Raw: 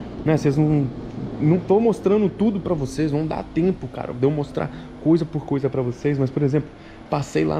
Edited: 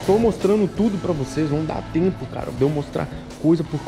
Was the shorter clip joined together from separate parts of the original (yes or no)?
no